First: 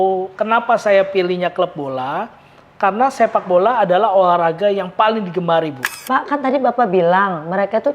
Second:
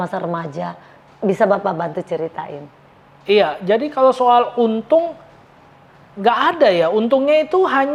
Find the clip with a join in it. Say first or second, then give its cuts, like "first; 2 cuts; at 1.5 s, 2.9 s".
first; 1 cut; at 5.9 s